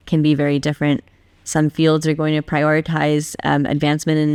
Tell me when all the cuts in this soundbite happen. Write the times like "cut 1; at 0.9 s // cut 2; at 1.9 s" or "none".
none